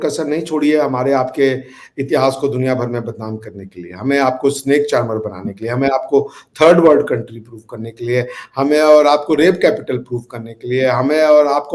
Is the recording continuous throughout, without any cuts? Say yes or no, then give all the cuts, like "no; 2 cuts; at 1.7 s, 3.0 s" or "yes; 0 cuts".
yes; 0 cuts